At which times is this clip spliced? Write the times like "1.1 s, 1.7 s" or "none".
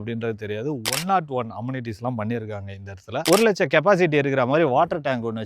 3.2 s